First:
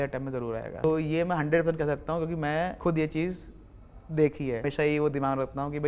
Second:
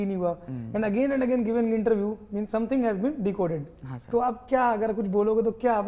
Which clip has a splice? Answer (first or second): first